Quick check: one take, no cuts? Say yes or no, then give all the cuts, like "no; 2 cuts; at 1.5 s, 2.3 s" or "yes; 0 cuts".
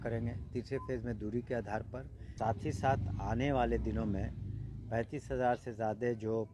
no; 1 cut; at 2.2 s